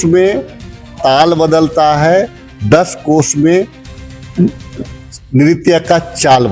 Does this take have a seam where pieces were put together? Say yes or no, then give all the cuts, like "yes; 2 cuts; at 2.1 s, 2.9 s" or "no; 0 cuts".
no; 0 cuts